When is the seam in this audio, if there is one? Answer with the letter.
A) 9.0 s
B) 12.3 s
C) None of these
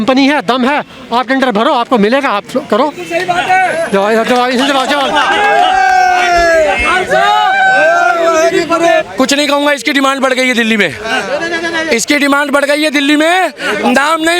A